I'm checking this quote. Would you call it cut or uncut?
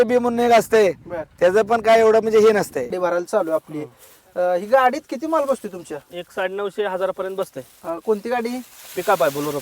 cut